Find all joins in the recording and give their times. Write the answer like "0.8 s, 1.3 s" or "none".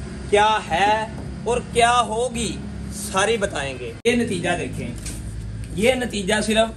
3.8 s